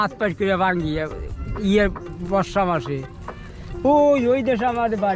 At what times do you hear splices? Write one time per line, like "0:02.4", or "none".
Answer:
none